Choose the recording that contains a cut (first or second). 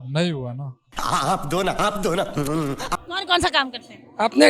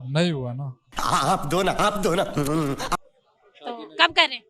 first